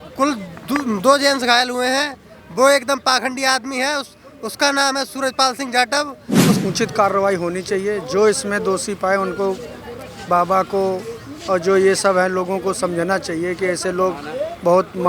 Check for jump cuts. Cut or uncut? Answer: cut